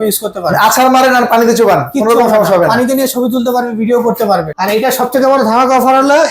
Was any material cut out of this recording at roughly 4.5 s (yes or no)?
yes